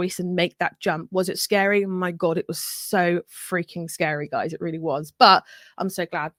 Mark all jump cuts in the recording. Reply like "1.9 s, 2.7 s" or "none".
none